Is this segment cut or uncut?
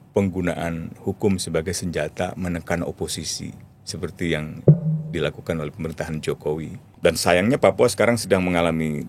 cut